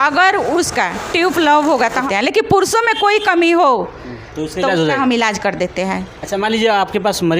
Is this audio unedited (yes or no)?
no